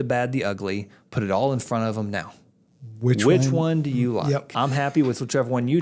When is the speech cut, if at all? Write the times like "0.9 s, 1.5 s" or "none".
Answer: 4.5 s